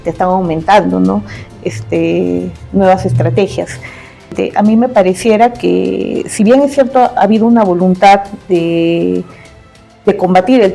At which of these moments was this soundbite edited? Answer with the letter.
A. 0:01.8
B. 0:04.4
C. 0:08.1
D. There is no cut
B